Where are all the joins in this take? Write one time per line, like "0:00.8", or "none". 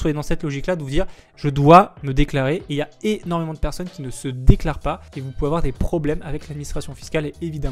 none